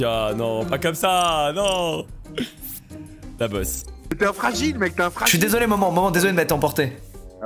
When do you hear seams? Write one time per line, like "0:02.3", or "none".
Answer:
none